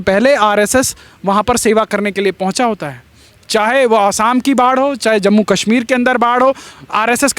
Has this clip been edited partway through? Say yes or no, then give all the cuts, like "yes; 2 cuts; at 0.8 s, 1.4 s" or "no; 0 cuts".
no; 0 cuts